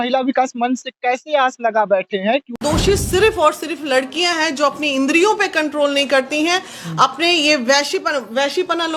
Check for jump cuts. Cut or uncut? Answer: cut